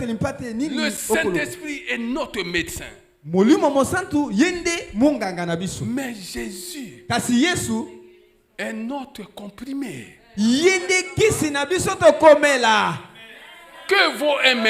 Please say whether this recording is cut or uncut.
uncut